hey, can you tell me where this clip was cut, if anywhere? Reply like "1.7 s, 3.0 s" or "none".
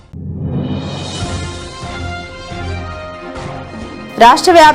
2.6 s